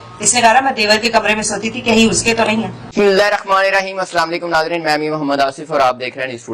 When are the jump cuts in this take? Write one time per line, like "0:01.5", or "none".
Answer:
0:02.8